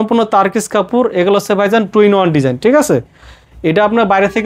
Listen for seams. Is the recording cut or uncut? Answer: uncut